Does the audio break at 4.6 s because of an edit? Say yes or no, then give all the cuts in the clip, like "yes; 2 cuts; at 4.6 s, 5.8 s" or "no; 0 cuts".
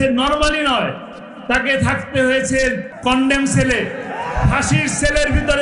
no; 1 cut; at 2.9 s